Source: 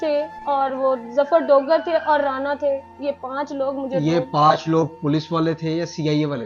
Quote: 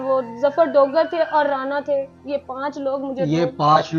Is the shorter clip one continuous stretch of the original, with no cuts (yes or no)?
yes